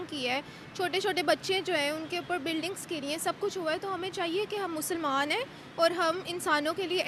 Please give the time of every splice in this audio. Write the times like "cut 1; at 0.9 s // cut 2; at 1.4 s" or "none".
none